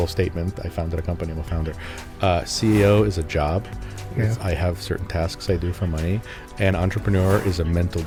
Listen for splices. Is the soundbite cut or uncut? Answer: uncut